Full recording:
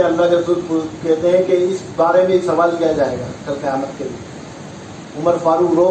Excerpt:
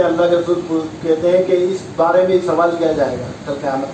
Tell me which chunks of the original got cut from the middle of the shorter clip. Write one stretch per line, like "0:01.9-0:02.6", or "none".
none